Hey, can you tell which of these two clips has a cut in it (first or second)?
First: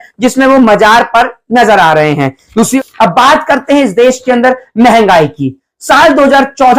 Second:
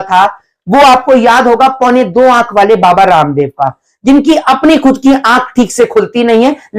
first